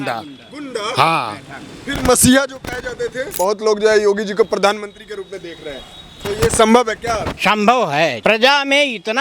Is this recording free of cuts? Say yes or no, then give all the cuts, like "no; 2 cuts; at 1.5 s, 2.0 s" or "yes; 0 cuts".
no; 3 cuts; at 3.3 s, 7.3 s, 8.2 s